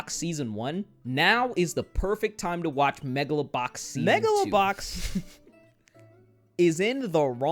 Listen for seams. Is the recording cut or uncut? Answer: cut